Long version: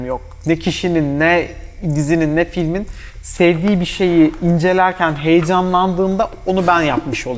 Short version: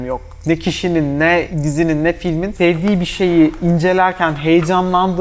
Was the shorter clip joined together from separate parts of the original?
yes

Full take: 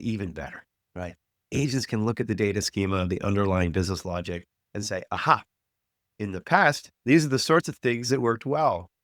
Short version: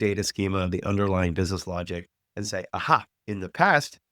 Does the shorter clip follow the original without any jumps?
no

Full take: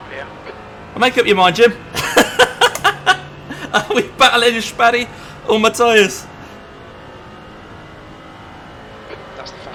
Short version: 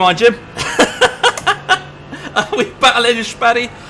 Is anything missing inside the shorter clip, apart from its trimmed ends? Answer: no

